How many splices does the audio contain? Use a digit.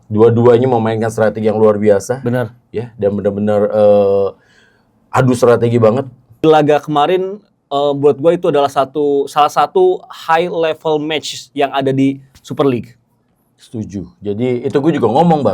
1